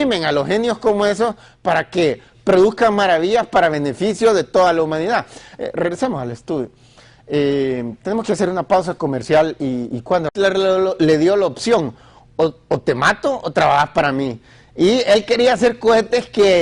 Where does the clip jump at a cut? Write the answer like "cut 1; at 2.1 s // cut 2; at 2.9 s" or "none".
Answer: none